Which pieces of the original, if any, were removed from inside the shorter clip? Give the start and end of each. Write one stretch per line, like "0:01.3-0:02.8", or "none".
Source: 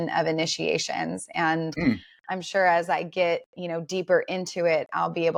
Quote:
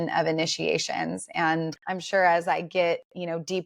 0:01.7-0:02.1